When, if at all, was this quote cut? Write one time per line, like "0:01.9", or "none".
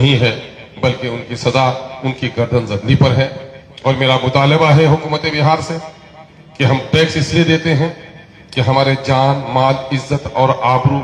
none